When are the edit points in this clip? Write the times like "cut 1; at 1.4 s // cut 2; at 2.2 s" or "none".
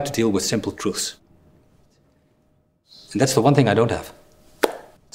cut 1; at 1.2 s // cut 2; at 2.9 s